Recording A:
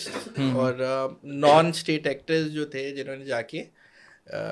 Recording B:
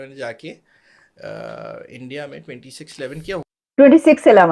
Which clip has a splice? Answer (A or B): B